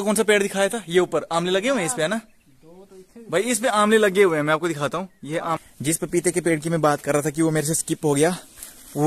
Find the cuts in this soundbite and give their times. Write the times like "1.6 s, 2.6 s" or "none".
5.7 s